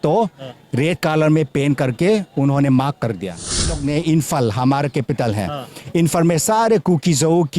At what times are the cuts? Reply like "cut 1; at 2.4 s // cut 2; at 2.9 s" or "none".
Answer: cut 1; at 3.8 s